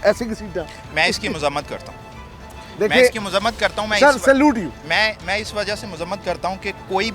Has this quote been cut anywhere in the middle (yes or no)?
no